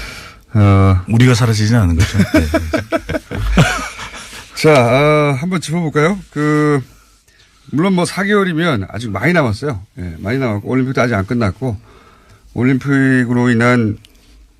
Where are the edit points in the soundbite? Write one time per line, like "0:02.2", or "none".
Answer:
0:10.6